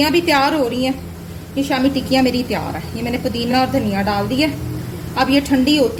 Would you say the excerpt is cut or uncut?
uncut